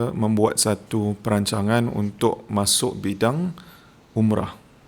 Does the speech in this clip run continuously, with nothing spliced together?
yes; 0 cuts

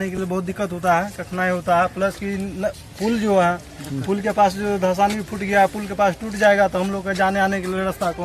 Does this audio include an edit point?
no; 0 cuts

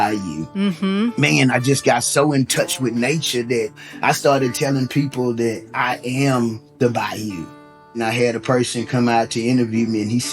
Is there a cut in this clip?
yes; 1 cut; at 8.0 s

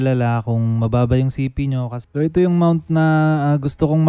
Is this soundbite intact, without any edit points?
no; 1 cut; at 2.0 s

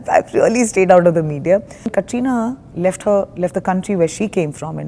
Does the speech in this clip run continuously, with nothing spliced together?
no; 1 cut; at 1.9 s

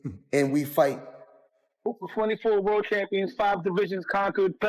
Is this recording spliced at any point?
yes; 1 cut; at 1.9 s

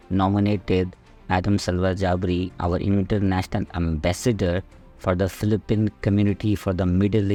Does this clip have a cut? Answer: no; 0 cuts

